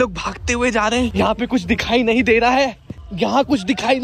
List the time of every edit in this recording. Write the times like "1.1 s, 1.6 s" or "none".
none